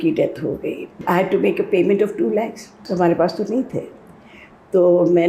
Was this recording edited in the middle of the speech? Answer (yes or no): yes